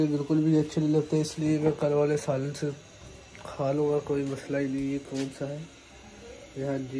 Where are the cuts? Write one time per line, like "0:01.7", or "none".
none